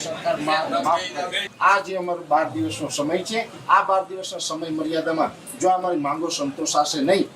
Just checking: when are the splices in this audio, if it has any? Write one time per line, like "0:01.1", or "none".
0:01.4